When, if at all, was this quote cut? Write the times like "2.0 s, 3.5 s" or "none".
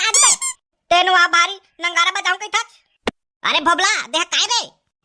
2.9 s